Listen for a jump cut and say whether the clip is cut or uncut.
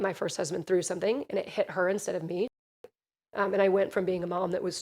cut